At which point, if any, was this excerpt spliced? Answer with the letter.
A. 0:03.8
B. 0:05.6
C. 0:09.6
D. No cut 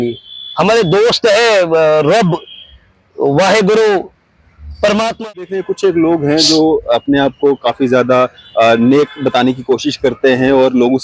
B